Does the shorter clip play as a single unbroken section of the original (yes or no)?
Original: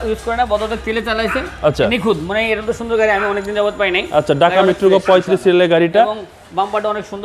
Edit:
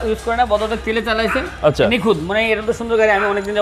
yes